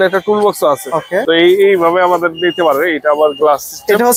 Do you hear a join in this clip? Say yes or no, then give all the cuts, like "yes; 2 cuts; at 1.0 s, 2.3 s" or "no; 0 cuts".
yes; 1 cut; at 1.2 s